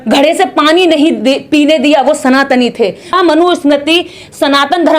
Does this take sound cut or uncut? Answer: cut